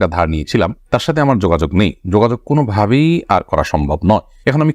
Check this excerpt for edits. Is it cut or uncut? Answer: uncut